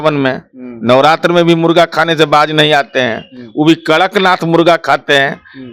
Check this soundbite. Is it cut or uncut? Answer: uncut